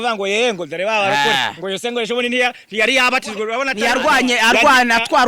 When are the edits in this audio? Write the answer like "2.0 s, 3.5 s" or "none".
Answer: 4.2 s